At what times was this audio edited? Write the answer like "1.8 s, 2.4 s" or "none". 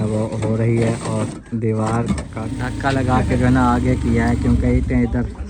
2.4 s